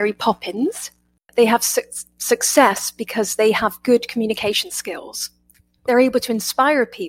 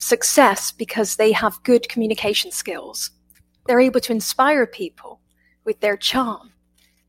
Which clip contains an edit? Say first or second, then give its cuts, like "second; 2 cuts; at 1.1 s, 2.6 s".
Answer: first; 1 cut; at 1.3 s